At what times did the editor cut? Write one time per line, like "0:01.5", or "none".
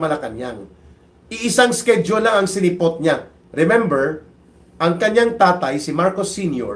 0:03.4